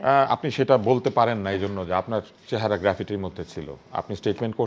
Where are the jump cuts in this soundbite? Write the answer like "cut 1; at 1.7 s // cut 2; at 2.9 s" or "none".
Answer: none